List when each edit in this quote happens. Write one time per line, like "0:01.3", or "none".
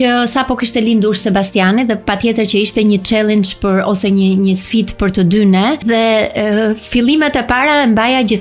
0:05.8